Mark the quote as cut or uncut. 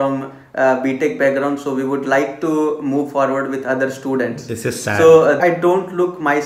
cut